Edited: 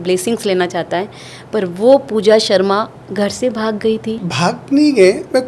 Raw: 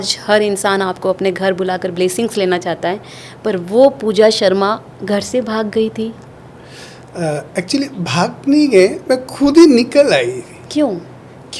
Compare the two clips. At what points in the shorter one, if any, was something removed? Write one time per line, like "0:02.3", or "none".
0:04.3